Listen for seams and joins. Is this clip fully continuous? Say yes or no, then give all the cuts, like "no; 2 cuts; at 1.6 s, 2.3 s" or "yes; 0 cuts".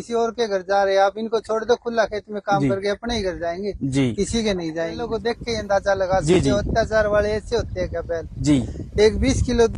no; 1 cut; at 5.0 s